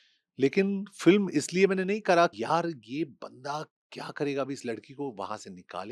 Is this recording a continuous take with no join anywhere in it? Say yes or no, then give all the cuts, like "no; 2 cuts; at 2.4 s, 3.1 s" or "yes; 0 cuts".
no; 1 cut; at 2.3 s